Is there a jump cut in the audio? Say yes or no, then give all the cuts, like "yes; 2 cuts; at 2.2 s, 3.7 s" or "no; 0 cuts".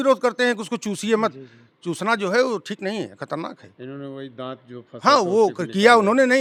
no; 0 cuts